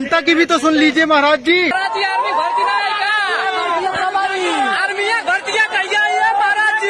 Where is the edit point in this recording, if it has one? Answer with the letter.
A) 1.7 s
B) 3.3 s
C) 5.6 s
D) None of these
A